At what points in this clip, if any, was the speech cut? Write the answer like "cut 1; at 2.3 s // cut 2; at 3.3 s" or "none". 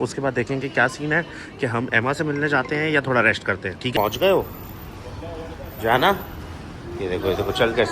cut 1; at 3.8 s